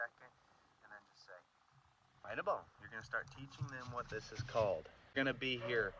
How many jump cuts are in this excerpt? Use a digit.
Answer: 1